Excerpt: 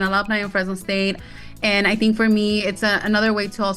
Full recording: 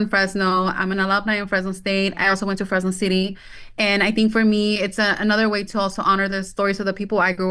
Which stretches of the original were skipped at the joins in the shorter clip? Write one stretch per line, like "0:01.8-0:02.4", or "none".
0:02.2-0:03.4